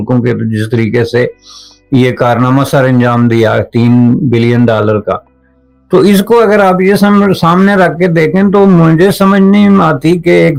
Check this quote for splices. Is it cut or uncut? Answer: uncut